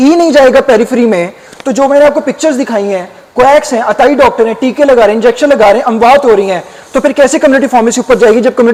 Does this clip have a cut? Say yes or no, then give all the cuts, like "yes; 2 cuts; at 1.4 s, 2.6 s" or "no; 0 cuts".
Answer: no; 0 cuts